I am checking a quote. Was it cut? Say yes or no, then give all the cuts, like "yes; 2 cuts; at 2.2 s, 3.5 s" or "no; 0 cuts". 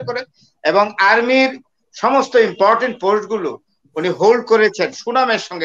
no; 0 cuts